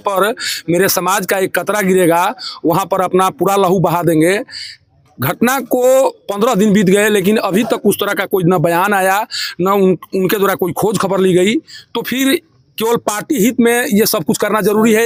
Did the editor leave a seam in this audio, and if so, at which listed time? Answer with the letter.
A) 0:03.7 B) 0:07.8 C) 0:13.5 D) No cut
D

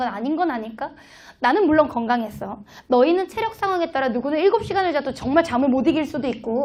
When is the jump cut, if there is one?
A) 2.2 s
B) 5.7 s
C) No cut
A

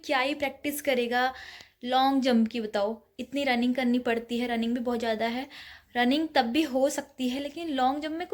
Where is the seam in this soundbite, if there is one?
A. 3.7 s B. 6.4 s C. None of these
C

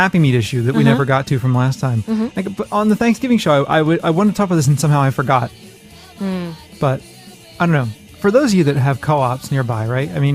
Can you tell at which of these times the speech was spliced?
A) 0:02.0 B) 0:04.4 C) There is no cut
A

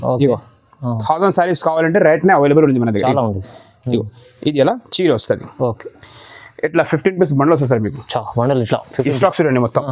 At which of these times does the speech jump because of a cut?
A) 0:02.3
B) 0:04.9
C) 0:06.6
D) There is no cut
D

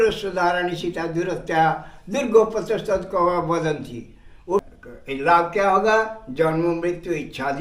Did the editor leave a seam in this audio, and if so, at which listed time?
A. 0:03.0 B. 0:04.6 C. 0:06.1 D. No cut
B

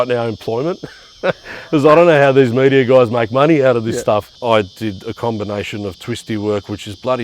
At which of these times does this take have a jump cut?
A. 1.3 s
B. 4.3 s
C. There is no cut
B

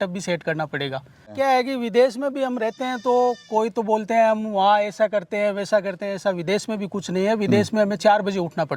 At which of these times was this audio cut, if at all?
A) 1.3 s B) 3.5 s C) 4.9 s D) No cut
A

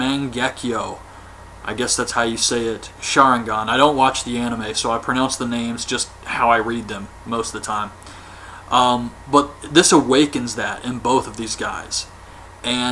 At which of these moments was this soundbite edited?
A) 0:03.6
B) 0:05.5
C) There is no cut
C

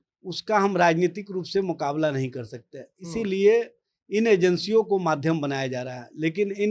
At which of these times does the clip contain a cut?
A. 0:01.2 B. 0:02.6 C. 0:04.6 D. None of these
D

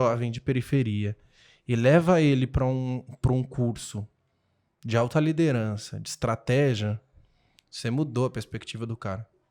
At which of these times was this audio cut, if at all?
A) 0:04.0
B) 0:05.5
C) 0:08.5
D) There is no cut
D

